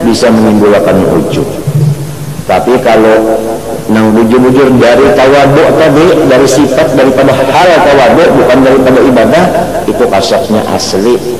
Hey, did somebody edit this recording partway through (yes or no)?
no